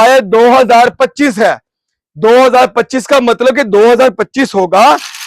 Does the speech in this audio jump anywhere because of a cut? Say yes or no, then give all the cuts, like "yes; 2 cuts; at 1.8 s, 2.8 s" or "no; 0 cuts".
no; 0 cuts